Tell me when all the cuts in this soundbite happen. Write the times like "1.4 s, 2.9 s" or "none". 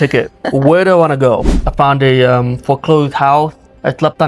1.6 s